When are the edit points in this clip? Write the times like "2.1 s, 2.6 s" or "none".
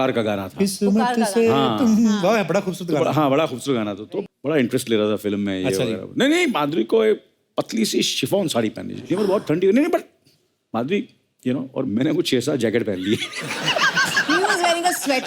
4.1 s

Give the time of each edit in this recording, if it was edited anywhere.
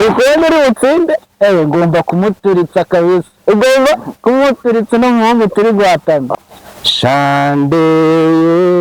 6.3 s

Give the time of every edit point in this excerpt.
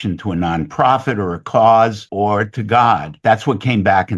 2.0 s, 3.1 s

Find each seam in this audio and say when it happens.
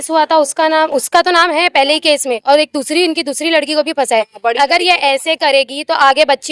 none

